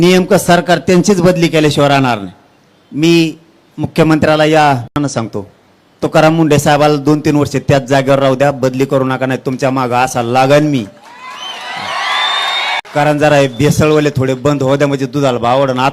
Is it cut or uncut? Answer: cut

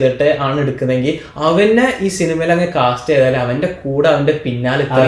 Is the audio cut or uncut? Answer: uncut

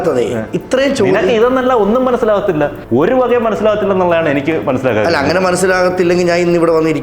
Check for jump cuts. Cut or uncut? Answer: cut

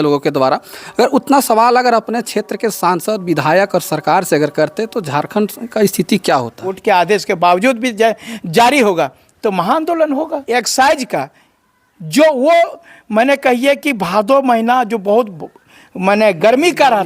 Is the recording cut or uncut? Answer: cut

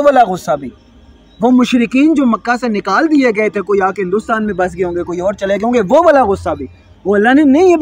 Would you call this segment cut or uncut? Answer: uncut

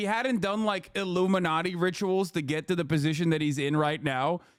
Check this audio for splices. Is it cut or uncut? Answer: uncut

